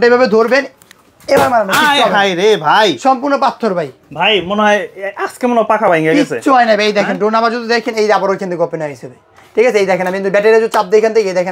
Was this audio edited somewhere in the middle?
no; 0 cuts

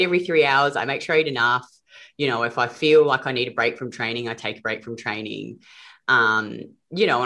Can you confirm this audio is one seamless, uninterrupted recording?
yes; 0 cuts

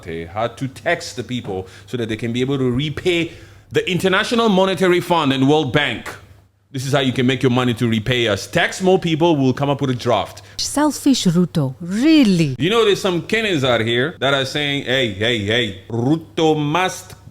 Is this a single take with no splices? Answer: no; 4 cuts; at 10.5 s, 12.8 s, 14.1 s, 15.8 s

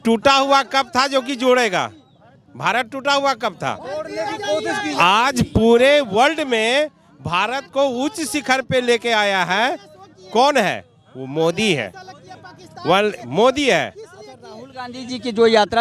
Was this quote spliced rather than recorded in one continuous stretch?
no; 0 cuts

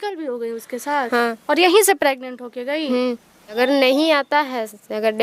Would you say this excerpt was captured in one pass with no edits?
no; 1 cut; at 3.6 s

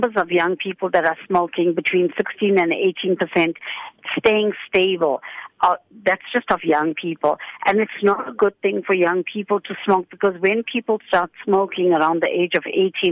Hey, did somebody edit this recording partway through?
no; 0 cuts

